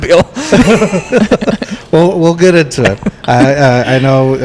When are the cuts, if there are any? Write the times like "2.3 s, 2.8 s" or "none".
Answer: none